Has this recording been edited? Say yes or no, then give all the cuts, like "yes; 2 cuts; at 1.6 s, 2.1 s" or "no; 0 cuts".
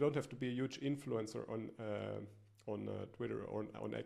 no; 0 cuts